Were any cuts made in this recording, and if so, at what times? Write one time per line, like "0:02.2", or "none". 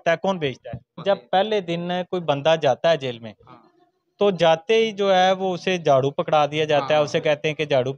0:00.9